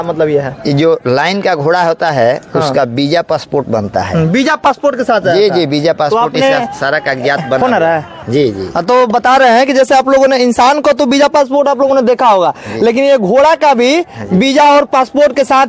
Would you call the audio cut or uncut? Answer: uncut